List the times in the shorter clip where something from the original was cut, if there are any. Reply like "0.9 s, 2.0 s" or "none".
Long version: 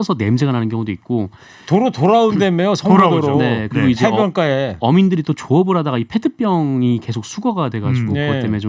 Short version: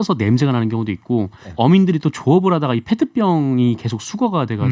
1.5 s